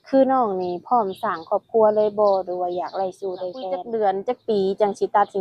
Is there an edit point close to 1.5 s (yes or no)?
no